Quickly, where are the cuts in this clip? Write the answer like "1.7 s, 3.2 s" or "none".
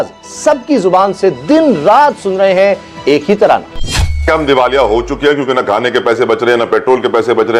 4.2 s